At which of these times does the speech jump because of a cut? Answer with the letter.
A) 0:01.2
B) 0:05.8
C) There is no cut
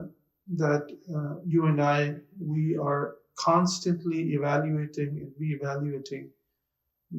C